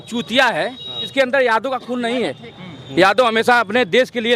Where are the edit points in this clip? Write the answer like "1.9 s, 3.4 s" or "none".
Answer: 1.0 s